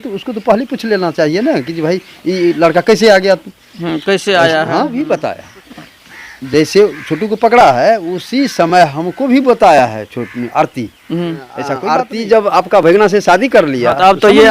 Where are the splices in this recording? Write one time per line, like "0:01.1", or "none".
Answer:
0:04.9
0:11.8